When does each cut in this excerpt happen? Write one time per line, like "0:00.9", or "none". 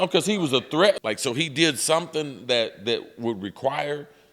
0:01.0